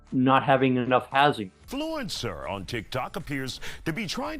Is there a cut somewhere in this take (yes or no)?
yes